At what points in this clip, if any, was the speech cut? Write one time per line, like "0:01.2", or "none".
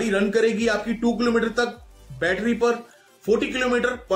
none